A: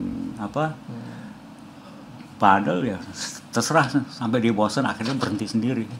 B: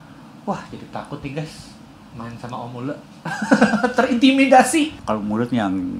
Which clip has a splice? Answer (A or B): B